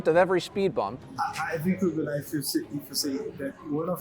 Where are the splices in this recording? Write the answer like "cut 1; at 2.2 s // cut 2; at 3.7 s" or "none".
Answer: cut 1; at 1.0 s